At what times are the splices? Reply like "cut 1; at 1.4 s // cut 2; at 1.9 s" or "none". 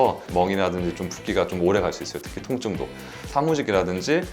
cut 1; at 3.3 s